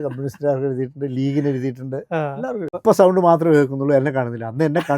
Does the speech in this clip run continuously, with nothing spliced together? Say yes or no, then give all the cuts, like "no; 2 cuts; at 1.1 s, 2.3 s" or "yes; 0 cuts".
no; 1 cut; at 2.7 s